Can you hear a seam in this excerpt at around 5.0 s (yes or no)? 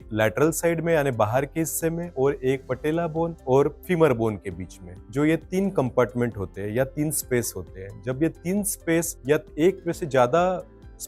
no